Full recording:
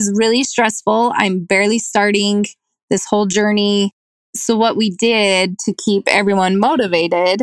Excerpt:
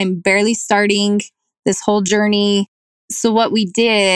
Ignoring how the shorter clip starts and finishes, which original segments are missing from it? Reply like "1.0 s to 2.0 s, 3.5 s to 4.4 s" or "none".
none